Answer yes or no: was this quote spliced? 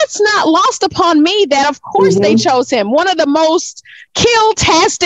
no